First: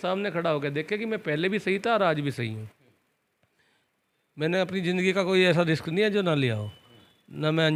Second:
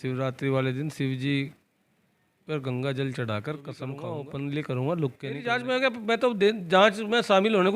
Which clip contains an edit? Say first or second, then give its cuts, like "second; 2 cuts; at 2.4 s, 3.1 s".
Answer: second; 2 cuts; at 4.0 s, 5.6 s